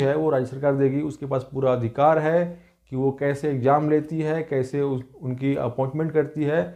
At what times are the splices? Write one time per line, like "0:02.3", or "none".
none